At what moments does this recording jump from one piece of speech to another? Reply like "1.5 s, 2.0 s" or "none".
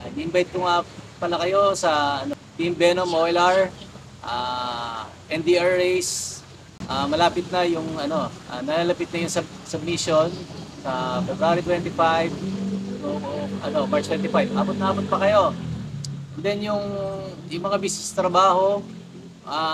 2.4 s